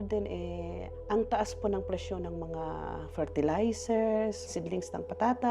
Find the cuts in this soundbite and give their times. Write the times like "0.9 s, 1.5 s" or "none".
4.4 s